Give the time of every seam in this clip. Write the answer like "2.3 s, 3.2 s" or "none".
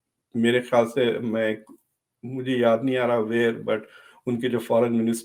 none